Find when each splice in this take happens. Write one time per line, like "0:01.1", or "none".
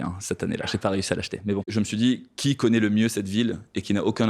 0:01.7